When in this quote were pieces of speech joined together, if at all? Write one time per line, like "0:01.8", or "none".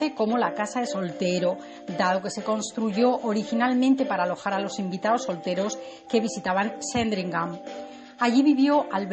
none